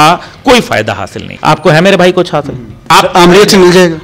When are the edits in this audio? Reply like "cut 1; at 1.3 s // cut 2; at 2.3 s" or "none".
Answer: cut 1; at 1.3 s // cut 2; at 2.9 s